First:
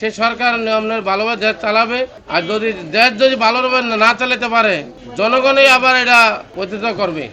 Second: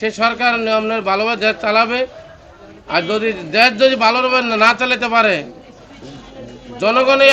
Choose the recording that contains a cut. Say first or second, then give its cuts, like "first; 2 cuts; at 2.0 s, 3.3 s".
first; 3 cuts; at 2.2 s, 5.0 s, 6.5 s